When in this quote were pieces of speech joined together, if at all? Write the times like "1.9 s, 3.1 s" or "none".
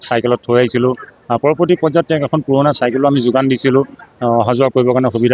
none